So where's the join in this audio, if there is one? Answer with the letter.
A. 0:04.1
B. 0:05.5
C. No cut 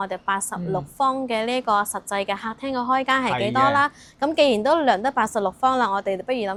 C